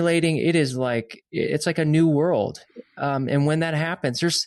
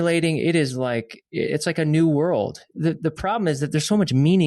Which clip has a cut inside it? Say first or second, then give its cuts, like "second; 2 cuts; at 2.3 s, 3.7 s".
second; 1 cut; at 2.7 s